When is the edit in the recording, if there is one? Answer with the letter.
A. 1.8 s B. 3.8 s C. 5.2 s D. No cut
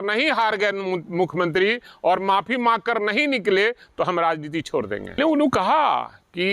C